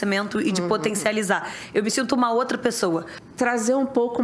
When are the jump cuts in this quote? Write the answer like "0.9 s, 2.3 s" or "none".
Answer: 3.2 s

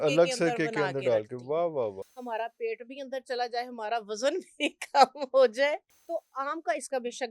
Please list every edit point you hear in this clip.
2.1 s, 5.9 s

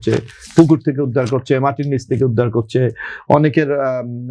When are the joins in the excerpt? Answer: none

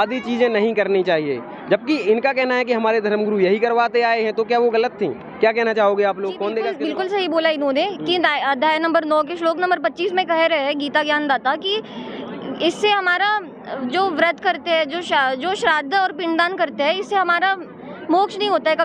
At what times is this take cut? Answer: 6.8 s

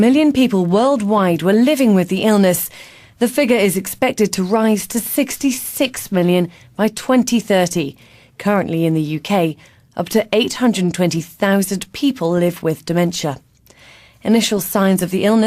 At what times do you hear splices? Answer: none

